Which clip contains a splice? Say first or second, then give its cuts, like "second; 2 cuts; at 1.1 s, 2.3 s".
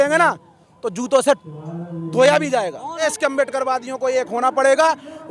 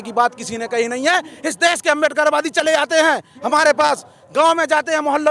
first; 1 cut; at 3.0 s